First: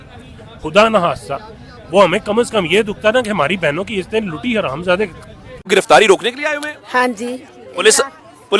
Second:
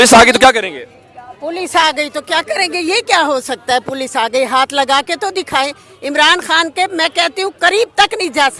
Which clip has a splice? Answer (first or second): first